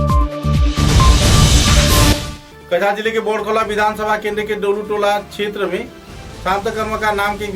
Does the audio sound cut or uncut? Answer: uncut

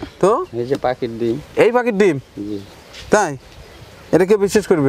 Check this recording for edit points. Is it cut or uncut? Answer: uncut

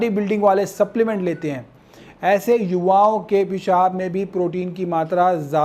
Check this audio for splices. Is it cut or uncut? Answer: uncut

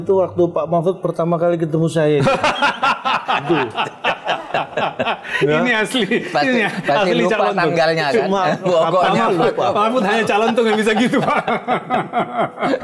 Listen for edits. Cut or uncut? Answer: uncut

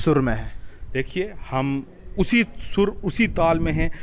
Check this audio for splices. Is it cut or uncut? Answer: uncut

